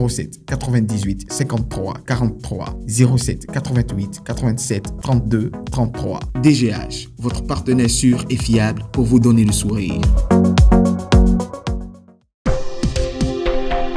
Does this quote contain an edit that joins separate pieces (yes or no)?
yes